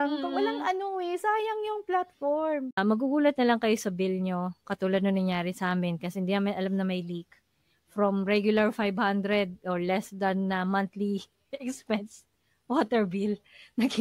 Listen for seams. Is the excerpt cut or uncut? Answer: cut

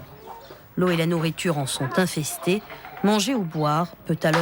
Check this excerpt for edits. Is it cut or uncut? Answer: uncut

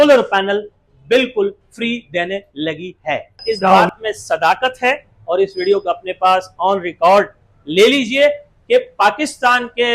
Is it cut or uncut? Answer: cut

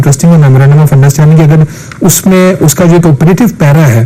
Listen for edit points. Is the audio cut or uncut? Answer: uncut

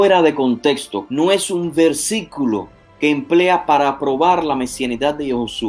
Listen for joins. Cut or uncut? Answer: cut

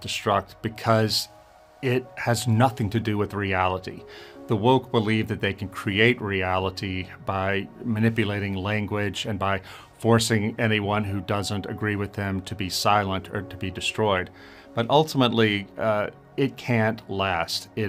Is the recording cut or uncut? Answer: uncut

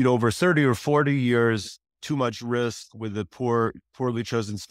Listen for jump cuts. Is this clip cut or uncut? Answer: cut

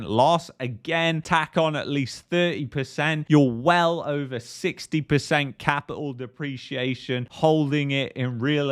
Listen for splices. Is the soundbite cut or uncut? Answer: uncut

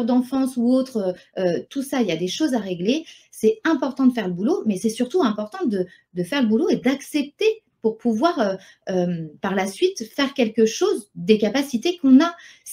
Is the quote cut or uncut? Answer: uncut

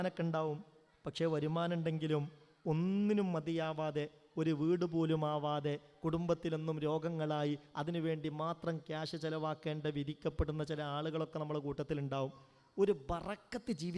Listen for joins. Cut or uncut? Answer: uncut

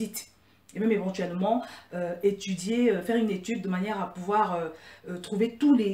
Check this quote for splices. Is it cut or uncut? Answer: uncut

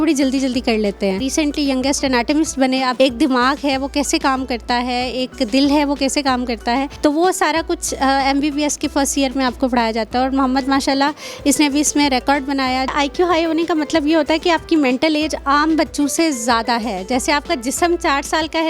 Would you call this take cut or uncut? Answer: cut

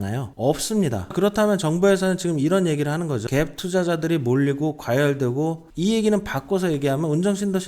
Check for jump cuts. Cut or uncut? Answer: cut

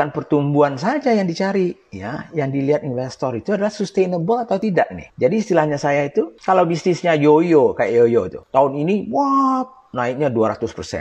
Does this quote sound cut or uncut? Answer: cut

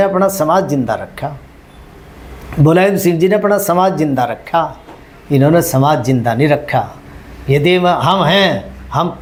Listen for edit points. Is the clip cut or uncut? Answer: uncut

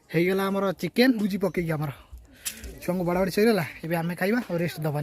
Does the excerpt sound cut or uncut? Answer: cut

